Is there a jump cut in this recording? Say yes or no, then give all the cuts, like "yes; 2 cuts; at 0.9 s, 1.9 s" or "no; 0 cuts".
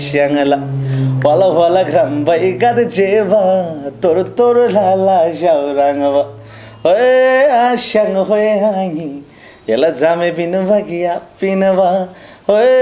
no; 0 cuts